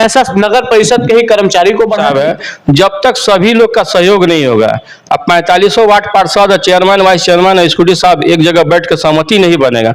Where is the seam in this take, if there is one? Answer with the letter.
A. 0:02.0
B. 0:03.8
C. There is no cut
A